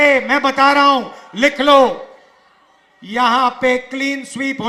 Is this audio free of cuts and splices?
yes; 0 cuts

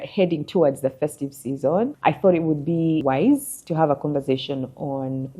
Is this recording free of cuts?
no; 2 cuts; at 2.0 s, 3.0 s

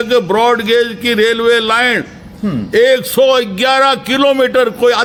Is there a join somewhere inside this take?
no; 0 cuts

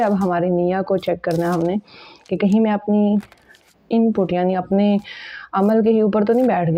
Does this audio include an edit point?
no; 0 cuts

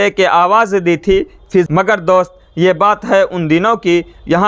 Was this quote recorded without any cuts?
no; 1 cut; at 1.7 s

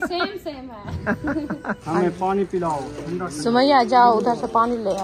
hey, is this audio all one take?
no; 1 cut; at 1.8 s

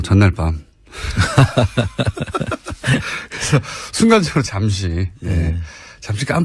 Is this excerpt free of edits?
yes; 0 cuts

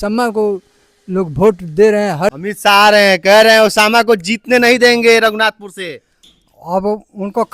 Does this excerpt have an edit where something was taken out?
yes; 1 cut; at 2.3 s

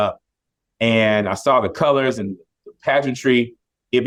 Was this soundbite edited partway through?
no; 0 cuts

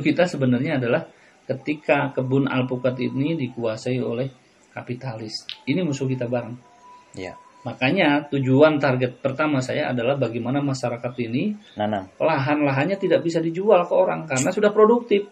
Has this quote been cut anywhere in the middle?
no; 0 cuts

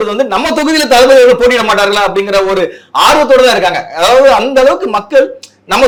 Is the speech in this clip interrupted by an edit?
no; 0 cuts

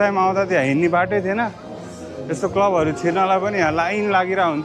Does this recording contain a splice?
no; 0 cuts

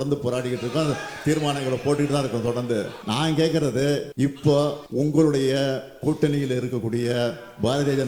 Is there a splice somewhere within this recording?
yes; 3 cuts; at 3.0 s, 4.1 s, 4.8 s

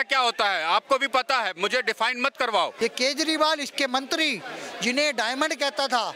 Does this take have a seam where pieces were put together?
yes; 1 cut; at 2.7 s

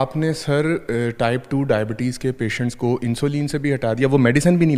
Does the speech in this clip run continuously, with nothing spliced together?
yes; 0 cuts

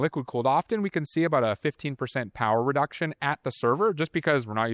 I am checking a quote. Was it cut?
no; 0 cuts

